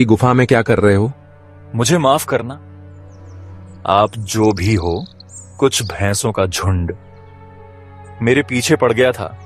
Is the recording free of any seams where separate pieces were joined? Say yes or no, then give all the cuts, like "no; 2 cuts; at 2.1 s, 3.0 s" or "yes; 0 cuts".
yes; 0 cuts